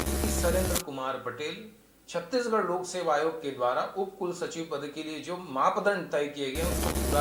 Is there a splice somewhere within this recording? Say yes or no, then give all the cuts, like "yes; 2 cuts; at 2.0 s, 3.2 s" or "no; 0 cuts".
no; 0 cuts